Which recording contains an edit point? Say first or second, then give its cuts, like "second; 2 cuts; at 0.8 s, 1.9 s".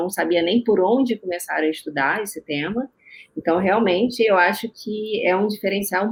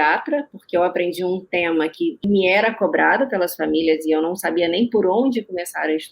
second; 1 cut; at 2.2 s